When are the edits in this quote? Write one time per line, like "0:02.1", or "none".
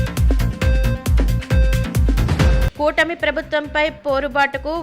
0:02.3